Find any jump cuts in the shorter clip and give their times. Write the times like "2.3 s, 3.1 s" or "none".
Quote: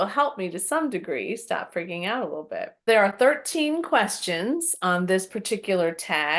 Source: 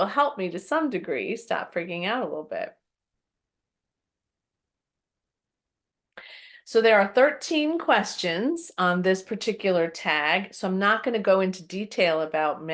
2.9 s